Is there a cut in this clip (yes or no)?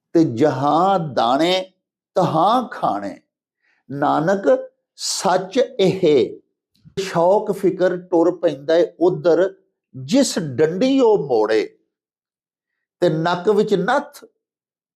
yes